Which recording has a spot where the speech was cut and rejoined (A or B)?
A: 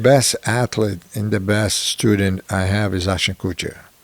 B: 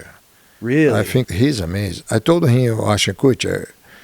B